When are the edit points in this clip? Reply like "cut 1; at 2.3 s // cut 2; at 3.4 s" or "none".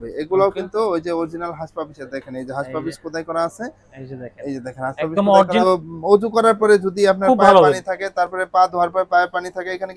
cut 1; at 5.6 s